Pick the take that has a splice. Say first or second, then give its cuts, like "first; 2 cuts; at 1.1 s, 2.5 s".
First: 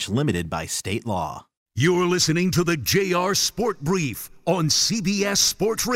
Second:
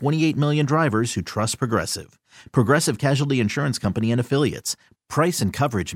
first; 1 cut; at 1.6 s